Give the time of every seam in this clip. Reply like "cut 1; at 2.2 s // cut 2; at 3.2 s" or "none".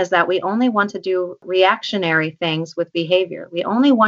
cut 1; at 1.4 s